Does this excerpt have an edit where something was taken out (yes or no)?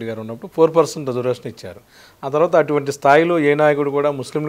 no